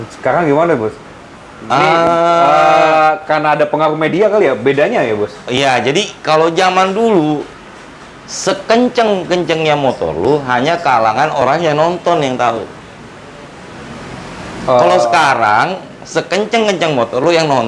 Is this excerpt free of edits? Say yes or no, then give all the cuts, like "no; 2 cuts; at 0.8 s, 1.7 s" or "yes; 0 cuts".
yes; 0 cuts